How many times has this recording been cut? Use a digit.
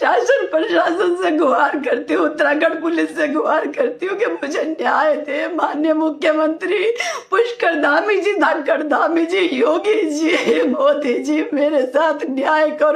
0